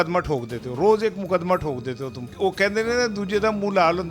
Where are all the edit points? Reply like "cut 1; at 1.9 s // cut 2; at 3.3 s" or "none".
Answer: cut 1; at 2.2 s